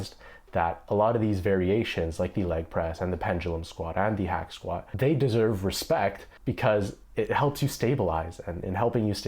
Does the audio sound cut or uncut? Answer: cut